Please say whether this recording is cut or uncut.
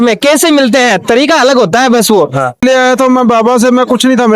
cut